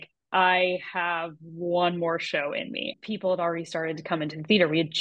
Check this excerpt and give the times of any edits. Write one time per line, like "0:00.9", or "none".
0:02.8